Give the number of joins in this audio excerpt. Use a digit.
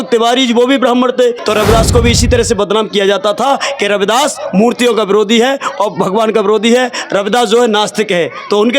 1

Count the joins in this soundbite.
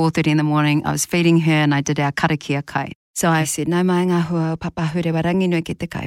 1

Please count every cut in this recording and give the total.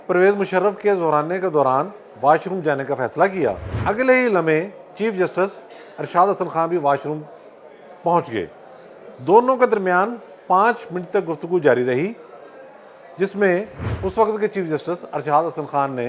2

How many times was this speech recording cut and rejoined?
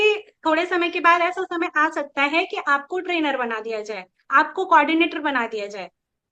0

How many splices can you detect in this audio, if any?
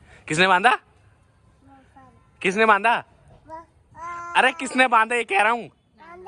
0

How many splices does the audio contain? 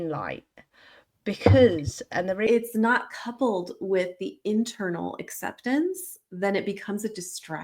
1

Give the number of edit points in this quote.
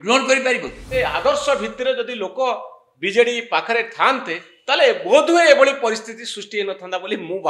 1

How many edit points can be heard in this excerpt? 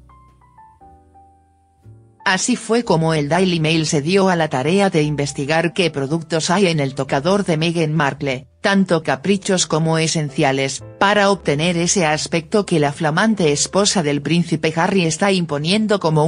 1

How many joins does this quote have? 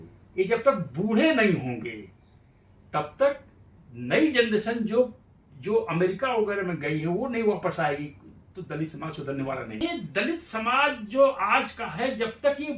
1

